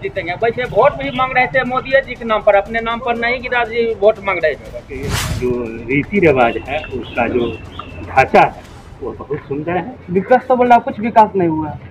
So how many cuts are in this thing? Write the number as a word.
one